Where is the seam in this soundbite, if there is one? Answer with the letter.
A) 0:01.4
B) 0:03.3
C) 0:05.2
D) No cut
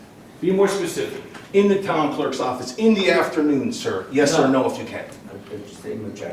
A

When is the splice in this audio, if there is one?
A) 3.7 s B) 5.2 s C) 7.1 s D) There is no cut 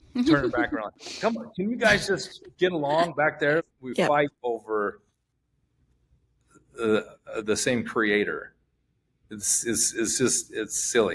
A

